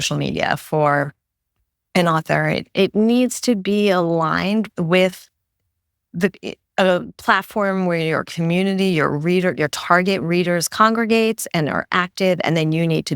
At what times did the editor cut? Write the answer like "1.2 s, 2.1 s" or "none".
none